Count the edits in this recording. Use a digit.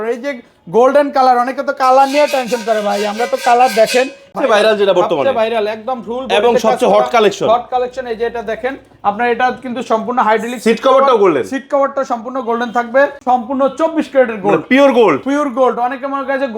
2